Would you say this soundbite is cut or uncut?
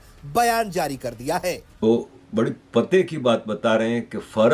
uncut